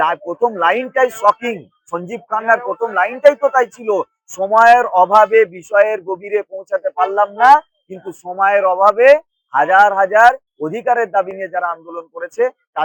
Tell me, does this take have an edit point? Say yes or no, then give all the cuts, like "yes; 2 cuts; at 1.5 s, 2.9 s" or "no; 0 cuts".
no; 0 cuts